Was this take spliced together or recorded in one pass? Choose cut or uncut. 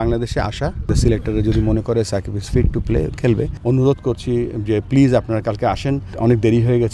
cut